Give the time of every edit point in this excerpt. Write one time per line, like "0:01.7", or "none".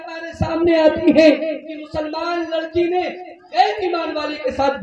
none